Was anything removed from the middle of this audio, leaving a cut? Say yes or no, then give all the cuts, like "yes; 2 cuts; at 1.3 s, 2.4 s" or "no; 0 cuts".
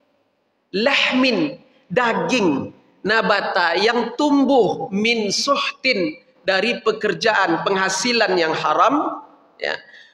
no; 0 cuts